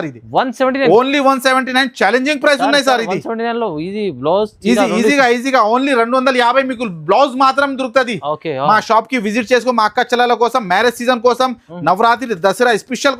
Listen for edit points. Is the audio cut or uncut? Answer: uncut